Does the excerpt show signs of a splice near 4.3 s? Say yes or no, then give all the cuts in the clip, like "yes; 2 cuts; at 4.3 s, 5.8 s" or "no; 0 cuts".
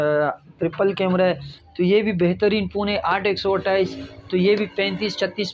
no; 1 cut; at 1.6 s